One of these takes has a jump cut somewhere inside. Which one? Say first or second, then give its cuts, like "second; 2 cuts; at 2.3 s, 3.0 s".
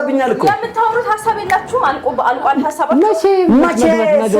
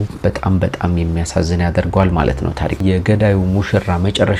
second; 1 cut; at 2.8 s